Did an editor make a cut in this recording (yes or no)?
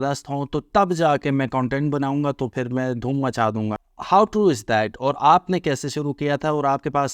yes